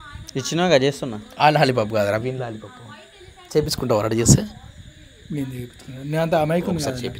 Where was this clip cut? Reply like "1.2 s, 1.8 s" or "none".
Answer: none